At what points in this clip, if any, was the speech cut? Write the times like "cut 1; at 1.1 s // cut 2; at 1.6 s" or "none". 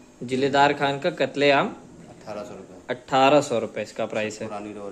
none

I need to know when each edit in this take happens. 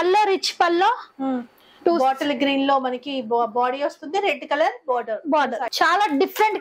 cut 1; at 5.7 s

